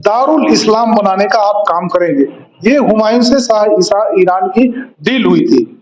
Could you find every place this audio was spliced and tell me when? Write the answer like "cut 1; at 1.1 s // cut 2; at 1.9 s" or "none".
none